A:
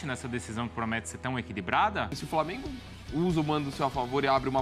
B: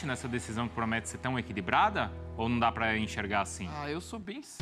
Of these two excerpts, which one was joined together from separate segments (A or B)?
A